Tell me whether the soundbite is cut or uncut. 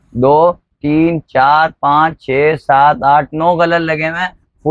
uncut